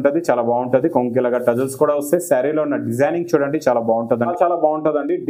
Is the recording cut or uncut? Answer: cut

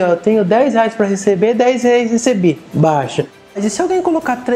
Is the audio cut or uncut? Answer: cut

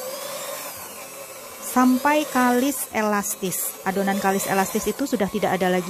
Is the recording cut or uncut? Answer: uncut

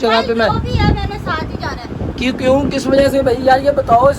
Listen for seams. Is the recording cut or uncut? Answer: uncut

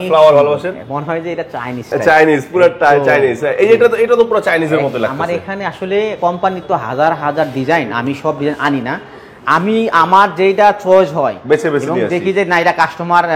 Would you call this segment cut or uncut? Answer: uncut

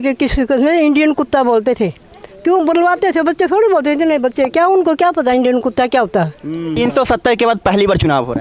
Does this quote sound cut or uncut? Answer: uncut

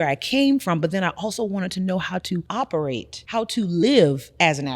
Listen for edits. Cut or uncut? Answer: cut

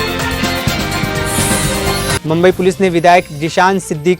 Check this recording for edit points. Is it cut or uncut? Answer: cut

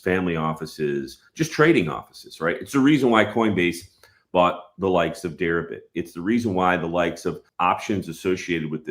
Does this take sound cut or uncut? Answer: cut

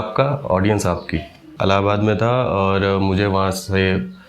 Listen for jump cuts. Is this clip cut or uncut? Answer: cut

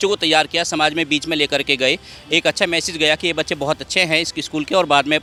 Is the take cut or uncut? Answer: uncut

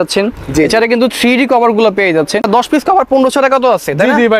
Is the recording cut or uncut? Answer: cut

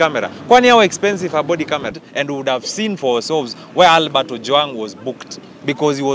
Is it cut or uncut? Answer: cut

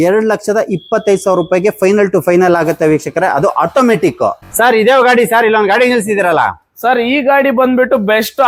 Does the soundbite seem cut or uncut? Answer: uncut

